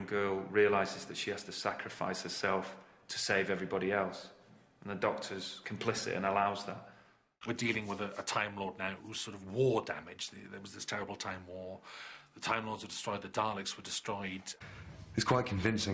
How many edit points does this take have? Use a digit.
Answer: 2